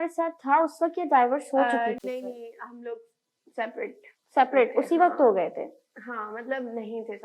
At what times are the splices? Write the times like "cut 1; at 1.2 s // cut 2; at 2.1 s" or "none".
none